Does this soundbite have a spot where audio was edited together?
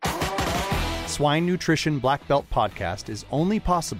yes; 1 cut; at 1.0 s

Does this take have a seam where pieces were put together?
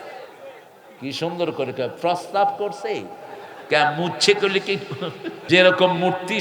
yes; 1 cut; at 5.3 s

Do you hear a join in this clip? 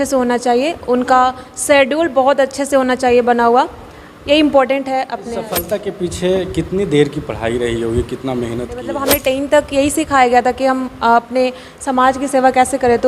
yes; 2 cuts; at 5.6 s, 8.9 s

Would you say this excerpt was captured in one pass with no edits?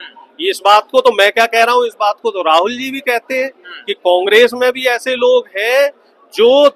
yes; 0 cuts

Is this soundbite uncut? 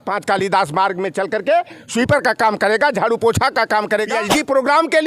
no; 1 cut; at 4.1 s

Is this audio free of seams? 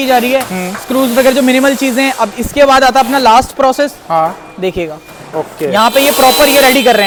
yes; 0 cuts

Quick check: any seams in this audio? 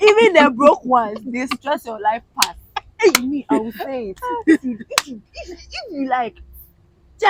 no; 0 cuts

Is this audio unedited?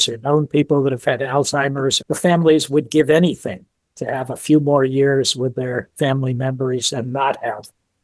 no; 1 cut; at 2.0 s

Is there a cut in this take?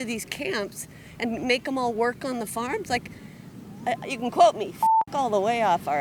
no; 0 cuts

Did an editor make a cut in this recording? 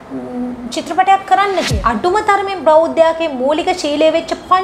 yes; 1 cut; at 1.7 s

